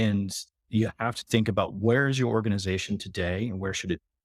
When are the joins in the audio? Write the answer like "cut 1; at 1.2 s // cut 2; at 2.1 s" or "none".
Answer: cut 1; at 1.2 s